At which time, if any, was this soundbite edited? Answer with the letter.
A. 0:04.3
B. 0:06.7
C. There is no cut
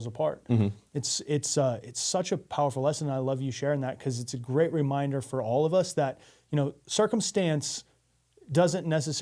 C